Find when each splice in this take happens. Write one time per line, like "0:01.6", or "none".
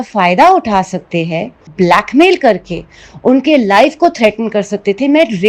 0:01.7